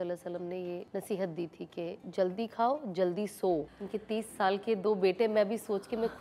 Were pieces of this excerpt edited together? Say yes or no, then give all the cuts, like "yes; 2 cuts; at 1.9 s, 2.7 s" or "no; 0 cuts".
yes; 3 cuts; at 0.8 s, 2.0 s, 3.7 s